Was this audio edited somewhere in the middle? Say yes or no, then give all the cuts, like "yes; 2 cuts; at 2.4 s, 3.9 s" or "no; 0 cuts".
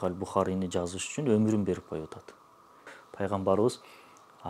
yes; 1 cut; at 3.0 s